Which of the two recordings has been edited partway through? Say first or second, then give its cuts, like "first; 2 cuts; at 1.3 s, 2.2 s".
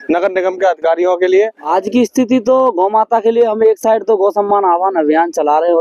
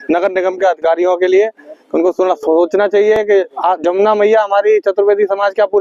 first; 1 cut; at 1.7 s